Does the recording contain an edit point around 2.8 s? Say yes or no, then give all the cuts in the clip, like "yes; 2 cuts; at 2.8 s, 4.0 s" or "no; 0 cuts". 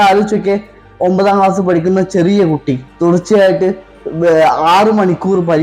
yes; 1 cut; at 2.8 s